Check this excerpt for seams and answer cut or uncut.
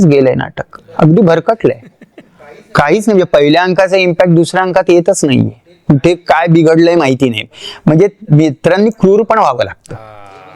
uncut